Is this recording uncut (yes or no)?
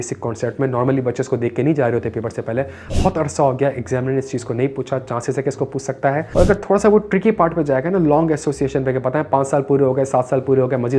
no